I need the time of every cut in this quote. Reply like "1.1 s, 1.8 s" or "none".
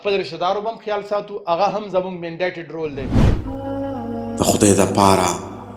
3.4 s